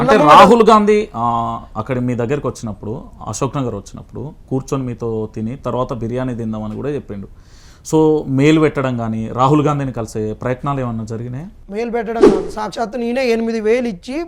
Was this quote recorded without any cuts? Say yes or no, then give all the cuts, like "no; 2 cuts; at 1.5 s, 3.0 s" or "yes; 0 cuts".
yes; 0 cuts